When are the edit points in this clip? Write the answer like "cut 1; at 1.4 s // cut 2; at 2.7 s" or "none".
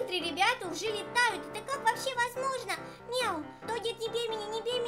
cut 1; at 3.6 s